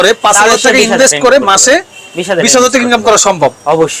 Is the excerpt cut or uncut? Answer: uncut